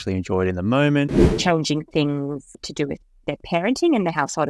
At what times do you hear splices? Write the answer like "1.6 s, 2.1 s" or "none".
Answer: 1.3 s, 2.5 s